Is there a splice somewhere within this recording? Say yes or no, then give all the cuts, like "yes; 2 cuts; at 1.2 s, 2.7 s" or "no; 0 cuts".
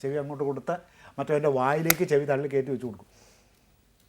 no; 0 cuts